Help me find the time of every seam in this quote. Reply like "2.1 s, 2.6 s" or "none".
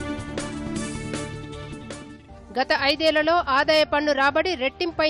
2.3 s